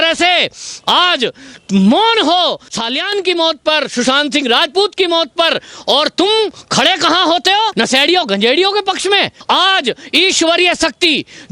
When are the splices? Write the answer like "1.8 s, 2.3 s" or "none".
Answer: 9.4 s

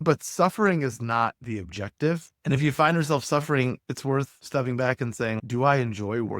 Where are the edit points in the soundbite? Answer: 5.4 s

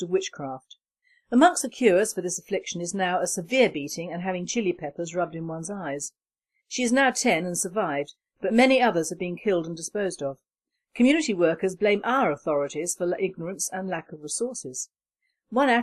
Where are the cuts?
1.7 s

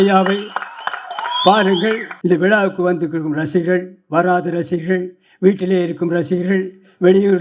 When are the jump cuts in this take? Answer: 2.1 s

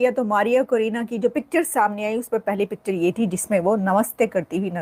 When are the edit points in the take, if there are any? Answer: none

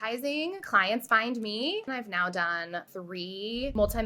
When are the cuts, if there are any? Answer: 1.9 s

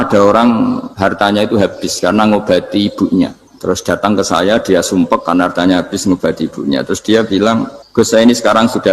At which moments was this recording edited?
0.9 s, 3.5 s, 7.8 s

